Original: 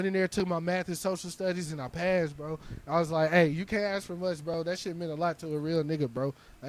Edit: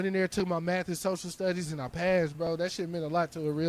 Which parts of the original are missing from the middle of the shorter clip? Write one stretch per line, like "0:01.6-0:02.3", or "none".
0:02.3-0:04.4